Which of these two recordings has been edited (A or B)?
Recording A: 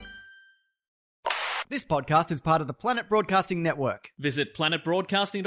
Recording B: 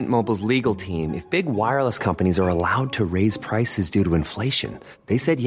A